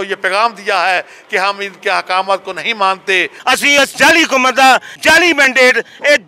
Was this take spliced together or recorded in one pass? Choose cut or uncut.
cut